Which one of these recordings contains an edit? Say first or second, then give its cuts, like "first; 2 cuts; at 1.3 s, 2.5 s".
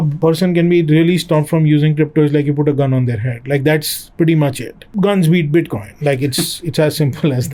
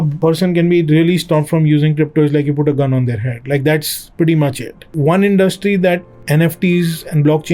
second; 1 cut; at 4.9 s